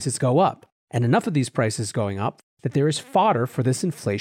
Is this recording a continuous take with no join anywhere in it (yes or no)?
no